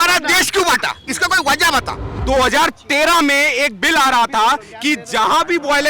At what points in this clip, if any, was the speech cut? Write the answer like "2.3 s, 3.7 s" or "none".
2.1 s